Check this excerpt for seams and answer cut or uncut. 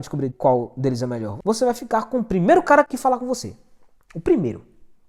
cut